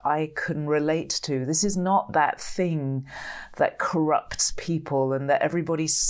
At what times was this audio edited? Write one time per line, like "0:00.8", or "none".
none